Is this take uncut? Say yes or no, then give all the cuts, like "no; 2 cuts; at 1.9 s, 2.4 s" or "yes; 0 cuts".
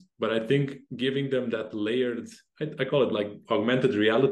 no; 1 cut; at 3.4 s